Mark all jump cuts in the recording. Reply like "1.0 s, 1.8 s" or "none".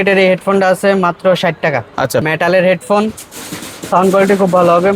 2.2 s